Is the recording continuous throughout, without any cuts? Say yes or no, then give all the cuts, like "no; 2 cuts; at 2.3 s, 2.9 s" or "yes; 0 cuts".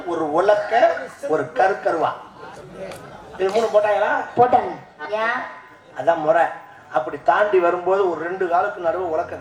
no; 1 cut; at 4.9 s